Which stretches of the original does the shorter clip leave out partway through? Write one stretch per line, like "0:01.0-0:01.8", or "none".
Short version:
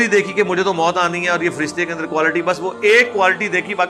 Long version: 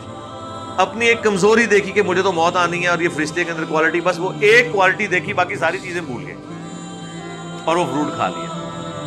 none